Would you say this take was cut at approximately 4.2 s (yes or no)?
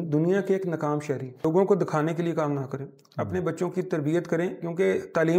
no